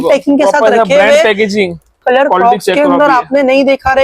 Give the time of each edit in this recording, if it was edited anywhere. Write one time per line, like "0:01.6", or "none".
0:02.0